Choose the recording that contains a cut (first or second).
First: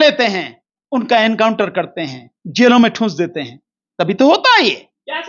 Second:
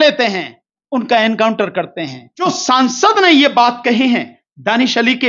second